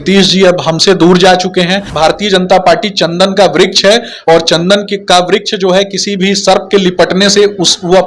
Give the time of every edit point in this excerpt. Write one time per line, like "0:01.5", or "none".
0:01.8